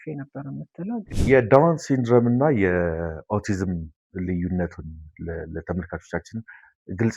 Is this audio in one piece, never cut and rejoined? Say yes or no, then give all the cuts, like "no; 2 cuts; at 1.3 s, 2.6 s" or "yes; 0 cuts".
no; 1 cut; at 1.1 s